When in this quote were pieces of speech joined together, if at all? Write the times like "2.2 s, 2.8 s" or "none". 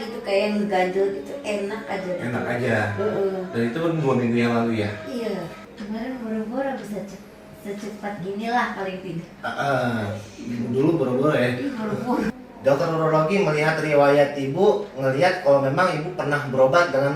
5.6 s, 12.3 s